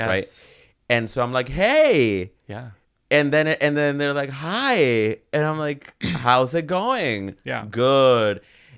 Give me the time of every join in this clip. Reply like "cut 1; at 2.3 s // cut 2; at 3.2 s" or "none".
none